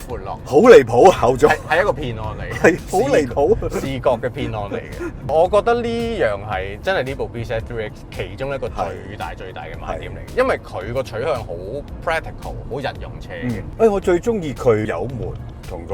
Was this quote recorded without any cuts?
yes; 0 cuts

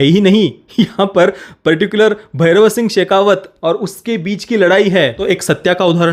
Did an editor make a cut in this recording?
yes; 1 cut; at 5.2 s

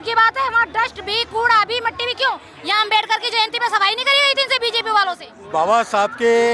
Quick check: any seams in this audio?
yes; 2 cuts; at 2.5 s, 5.3 s

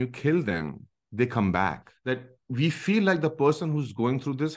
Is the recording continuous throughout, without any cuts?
no; 1 cut; at 1.9 s

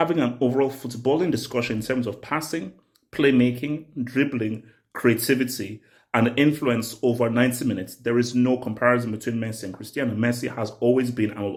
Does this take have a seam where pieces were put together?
no; 0 cuts

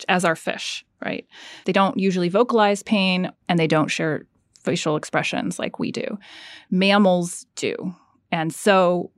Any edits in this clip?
no; 0 cuts

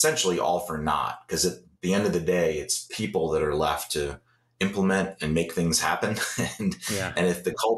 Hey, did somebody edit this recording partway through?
no; 0 cuts

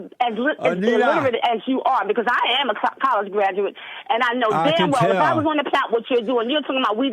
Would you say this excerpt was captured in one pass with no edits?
no; 1 cut; at 5.8 s

